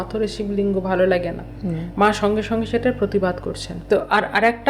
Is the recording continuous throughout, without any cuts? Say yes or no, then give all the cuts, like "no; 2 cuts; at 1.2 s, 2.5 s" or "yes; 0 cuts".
no; 1 cut; at 3.8 s